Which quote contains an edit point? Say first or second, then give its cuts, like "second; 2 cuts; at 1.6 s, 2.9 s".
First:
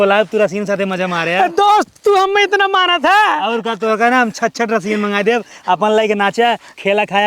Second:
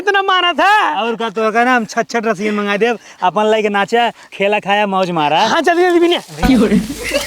second; 1 cut; at 6.3 s